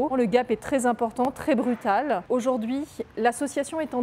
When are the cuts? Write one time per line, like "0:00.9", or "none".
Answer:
0:02.2